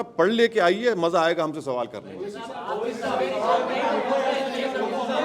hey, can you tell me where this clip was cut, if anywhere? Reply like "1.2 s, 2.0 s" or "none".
none